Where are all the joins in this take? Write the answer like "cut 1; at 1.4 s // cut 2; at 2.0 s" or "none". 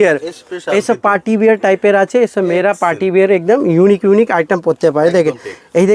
none